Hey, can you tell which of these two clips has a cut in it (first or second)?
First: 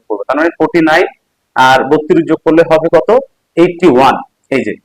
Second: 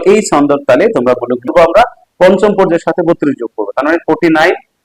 second